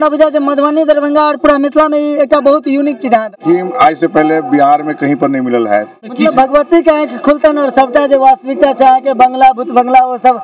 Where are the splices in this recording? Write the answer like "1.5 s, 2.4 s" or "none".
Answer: 3.3 s, 6.1 s